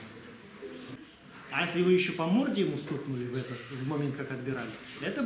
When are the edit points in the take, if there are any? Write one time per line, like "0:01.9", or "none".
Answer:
0:00.9